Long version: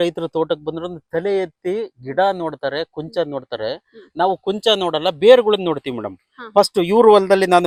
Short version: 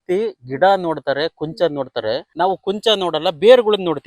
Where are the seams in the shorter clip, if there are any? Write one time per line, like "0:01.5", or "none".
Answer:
0:02.3